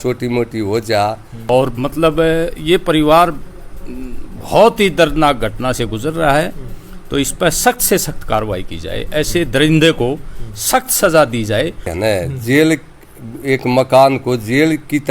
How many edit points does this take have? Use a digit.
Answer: 2